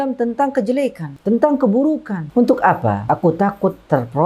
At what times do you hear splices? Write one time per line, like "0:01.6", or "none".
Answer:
0:01.1
0:02.2
0:03.0